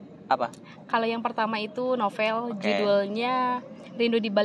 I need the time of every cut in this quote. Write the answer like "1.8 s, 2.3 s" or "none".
none